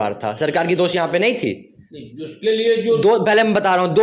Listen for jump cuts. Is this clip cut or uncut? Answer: uncut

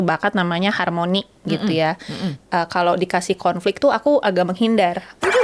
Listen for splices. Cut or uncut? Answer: uncut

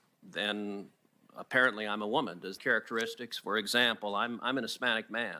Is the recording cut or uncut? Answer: cut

